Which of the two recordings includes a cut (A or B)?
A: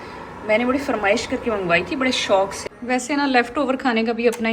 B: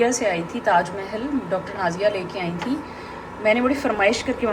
A